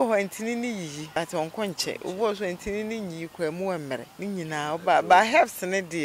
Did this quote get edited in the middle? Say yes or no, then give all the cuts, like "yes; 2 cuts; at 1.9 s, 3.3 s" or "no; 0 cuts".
yes; 2 cuts; at 1.1 s, 4.1 s